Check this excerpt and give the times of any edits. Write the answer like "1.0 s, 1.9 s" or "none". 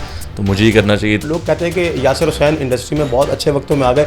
1.2 s